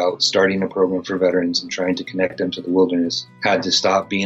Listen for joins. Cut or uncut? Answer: cut